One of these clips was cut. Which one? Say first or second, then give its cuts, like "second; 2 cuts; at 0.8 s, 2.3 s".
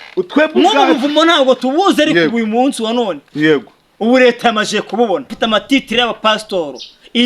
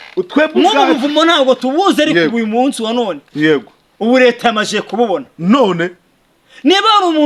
first; 1 cut; at 5.3 s